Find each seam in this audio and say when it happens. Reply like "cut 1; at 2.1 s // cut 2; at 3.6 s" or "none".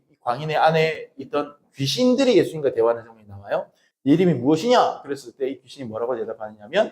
cut 1; at 3.8 s